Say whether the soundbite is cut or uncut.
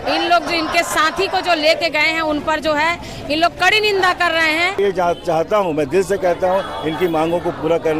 cut